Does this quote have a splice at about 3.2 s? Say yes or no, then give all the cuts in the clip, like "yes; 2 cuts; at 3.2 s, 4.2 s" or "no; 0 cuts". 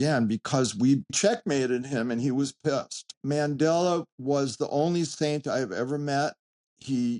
yes; 2 cuts; at 1.2 s, 3.2 s